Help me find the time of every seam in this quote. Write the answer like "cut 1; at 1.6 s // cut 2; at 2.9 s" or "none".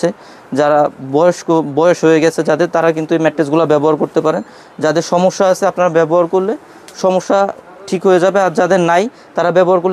none